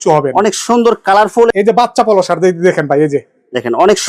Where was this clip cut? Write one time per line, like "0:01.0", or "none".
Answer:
0:01.5